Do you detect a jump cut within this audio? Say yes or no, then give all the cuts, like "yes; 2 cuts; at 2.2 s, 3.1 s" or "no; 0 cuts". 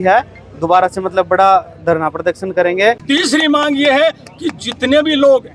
yes; 1 cut; at 3.0 s